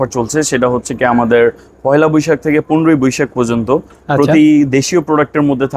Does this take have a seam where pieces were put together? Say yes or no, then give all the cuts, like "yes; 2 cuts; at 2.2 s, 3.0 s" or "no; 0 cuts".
no; 0 cuts